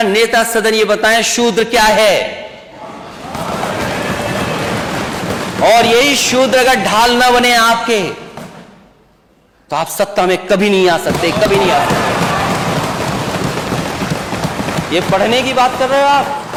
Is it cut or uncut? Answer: uncut